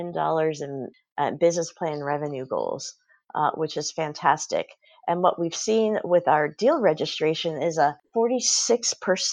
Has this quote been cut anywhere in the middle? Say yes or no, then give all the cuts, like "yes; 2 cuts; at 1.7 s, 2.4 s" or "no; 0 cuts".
yes; 1 cut; at 8.0 s